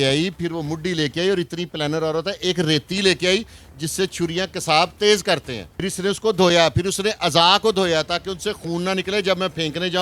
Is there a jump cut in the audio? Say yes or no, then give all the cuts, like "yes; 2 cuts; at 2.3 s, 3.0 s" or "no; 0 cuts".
yes; 1 cut; at 5.9 s